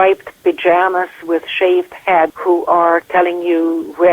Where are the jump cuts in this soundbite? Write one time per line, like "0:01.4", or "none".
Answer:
0:02.4